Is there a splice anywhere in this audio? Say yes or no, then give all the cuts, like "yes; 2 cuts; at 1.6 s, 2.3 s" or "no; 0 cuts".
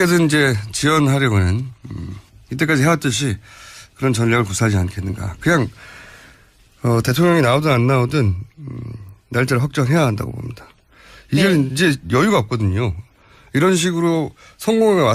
no; 0 cuts